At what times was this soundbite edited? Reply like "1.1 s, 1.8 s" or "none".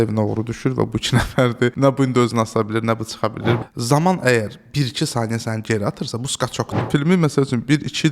1.7 s, 3.6 s, 6.8 s